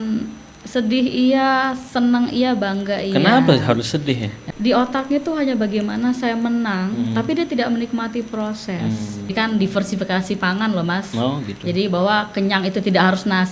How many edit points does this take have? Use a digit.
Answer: 2